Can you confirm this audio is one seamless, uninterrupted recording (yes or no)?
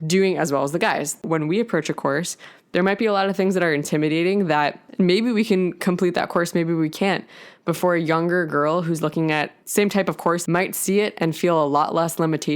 no